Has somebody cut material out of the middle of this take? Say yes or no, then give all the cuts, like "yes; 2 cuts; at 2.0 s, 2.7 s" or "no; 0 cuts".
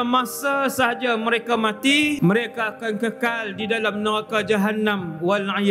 yes; 1 cut; at 2.2 s